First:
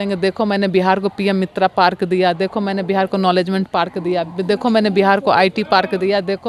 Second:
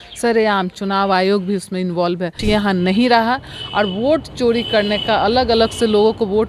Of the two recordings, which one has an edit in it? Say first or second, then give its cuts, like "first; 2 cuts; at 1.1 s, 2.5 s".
second; 1 cut; at 2.3 s